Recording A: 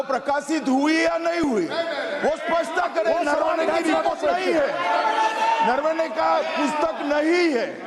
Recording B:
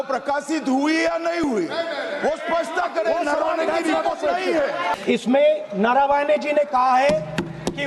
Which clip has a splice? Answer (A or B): B